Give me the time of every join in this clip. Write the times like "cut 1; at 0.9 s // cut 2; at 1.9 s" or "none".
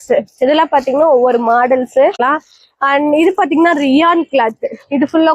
cut 1; at 2.2 s